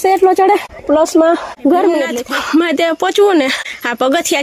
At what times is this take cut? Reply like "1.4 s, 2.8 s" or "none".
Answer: 2.2 s